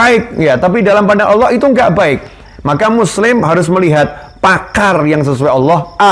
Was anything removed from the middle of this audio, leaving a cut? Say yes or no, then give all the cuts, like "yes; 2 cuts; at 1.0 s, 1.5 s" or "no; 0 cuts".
no; 0 cuts